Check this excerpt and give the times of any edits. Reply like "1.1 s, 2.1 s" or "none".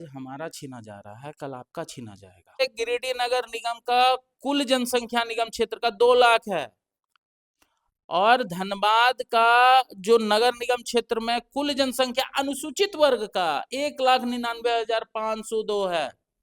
2.6 s

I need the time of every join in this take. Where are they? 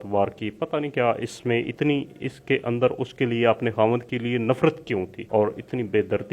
1.7 s, 5.2 s

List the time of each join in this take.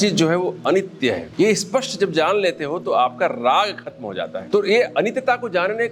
1.2 s, 4.4 s

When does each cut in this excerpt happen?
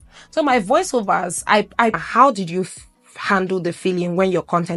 2.0 s

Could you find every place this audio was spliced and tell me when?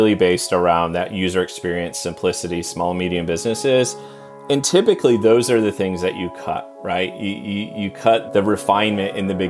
8.3 s

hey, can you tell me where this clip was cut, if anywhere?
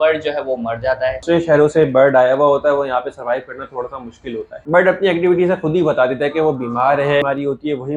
1.2 s, 4.6 s, 7.2 s

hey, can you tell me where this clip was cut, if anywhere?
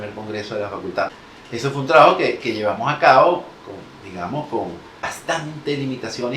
1.1 s, 5.1 s

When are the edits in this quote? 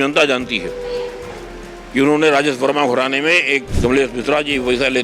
3.7 s

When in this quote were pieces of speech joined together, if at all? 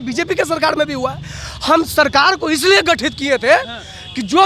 none

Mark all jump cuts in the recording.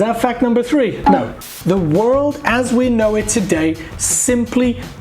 1.4 s

